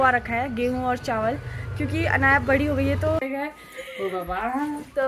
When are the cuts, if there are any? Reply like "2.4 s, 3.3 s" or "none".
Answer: 3.2 s